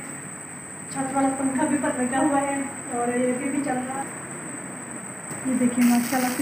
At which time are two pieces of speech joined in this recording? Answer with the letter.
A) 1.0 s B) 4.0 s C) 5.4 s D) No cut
B